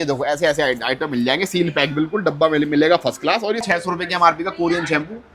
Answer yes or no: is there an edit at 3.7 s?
yes